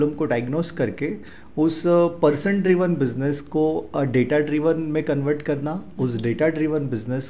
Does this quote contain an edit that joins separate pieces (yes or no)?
no